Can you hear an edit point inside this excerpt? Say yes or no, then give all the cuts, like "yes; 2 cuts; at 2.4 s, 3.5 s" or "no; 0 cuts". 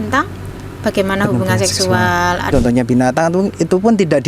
yes; 1 cut; at 2.5 s